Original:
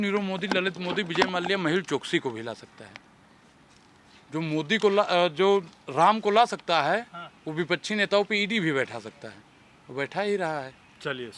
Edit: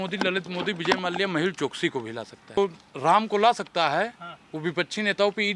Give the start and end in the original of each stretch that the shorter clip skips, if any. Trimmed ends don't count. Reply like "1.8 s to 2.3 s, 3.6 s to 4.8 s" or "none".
2.9 s to 5.5 s

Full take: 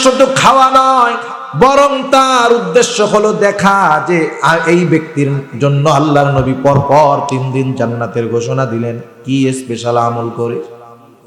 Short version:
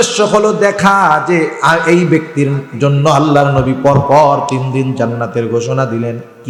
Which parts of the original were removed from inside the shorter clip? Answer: none

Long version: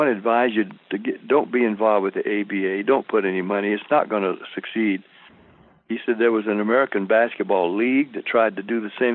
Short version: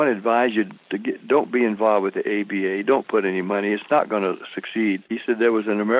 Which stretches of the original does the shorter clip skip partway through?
5.1 s to 5.9 s

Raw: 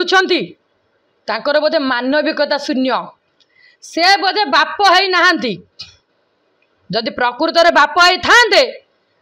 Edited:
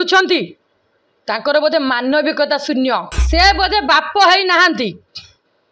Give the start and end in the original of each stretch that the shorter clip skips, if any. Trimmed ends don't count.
3.2 s to 3.8 s

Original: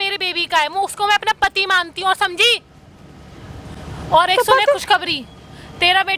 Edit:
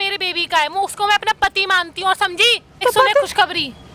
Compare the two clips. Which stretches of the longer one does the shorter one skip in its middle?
2.8 s to 4.3 s

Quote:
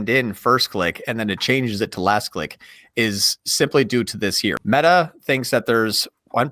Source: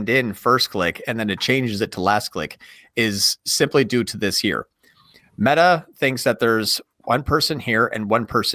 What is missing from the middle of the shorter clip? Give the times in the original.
4.6 s to 5.3 s

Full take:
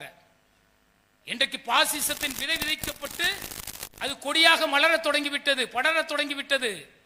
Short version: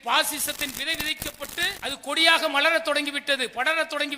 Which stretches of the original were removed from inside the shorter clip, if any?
3.4 s to 3.9 s

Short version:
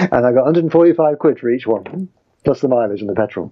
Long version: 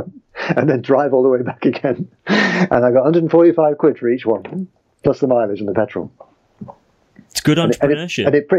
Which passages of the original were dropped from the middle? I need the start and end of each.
none

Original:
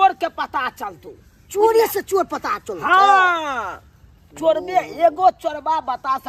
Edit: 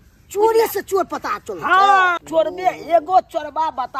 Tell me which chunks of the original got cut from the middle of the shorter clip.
3.4 s to 4.3 s

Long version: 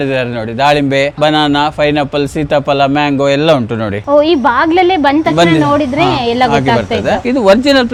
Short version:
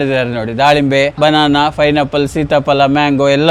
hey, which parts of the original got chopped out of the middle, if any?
none

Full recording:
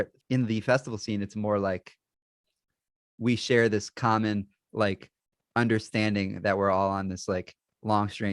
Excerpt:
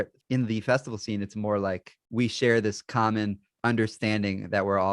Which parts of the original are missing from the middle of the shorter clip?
2.0 s to 3.0 s, 4.5 s to 5.4 s

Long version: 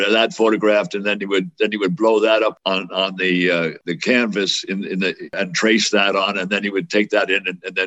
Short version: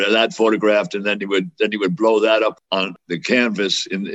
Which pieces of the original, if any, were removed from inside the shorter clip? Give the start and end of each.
2.9 s to 3.7 s

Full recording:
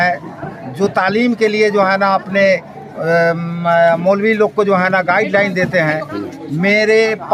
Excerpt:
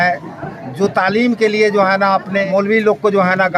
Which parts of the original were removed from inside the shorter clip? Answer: 2.4 s to 4.0 s

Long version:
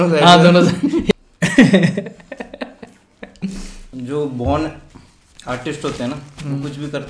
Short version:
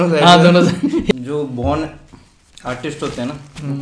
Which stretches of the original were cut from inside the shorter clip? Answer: 1.2 s to 4.1 s

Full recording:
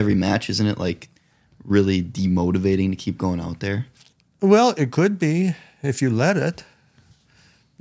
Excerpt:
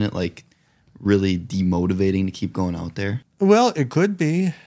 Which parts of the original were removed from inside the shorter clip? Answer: 3.9 s to 4.2 s

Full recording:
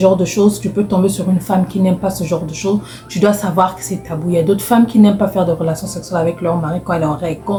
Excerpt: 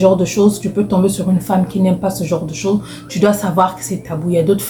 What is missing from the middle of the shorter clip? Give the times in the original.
none

